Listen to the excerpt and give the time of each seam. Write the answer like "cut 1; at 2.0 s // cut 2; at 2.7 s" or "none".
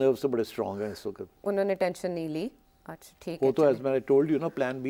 none